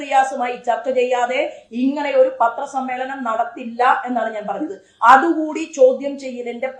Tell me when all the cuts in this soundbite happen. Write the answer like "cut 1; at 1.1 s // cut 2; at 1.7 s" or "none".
none